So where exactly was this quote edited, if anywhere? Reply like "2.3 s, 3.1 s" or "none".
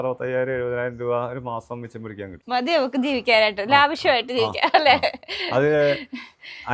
2.3 s